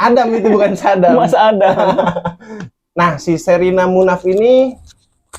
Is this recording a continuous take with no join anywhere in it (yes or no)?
no